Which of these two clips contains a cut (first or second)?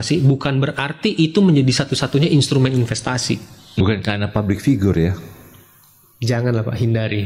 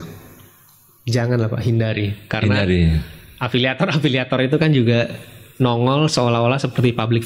first